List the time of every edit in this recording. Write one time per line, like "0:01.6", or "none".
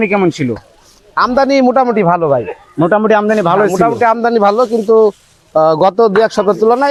none